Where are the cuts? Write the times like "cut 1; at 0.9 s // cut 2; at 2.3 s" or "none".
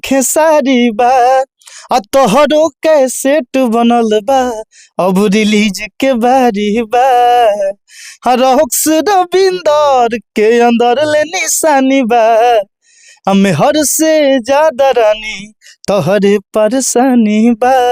none